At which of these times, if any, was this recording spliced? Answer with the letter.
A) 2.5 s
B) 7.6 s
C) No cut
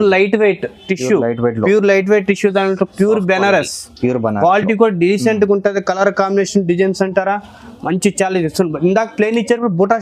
C